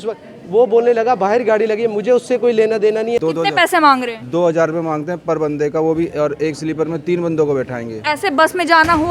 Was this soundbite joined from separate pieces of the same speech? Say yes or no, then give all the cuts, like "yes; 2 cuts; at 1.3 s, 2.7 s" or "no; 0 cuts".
yes; 1 cut; at 3.2 s